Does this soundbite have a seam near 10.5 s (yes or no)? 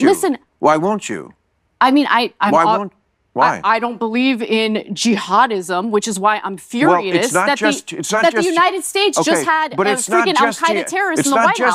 no